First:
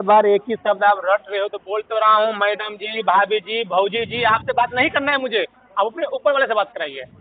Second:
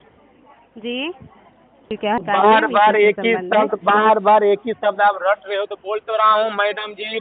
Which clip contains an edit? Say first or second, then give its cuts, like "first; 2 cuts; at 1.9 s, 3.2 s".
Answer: second; 1 cut; at 2.2 s